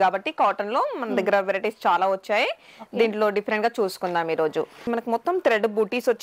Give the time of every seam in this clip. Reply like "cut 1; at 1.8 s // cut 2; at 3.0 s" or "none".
cut 1; at 4.8 s